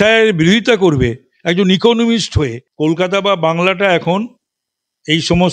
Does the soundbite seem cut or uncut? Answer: cut